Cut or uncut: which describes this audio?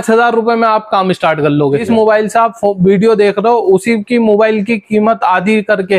cut